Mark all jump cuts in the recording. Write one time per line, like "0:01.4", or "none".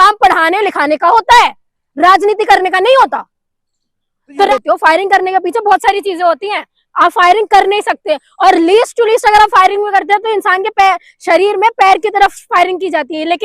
0:04.5